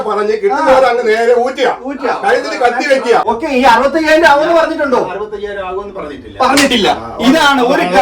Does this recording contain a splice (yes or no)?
yes